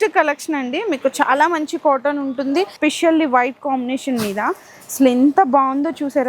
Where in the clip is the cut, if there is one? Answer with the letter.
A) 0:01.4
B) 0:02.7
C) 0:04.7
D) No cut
B